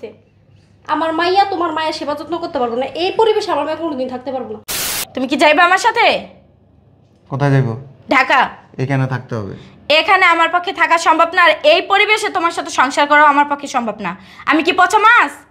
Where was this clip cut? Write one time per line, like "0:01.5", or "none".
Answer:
0:04.7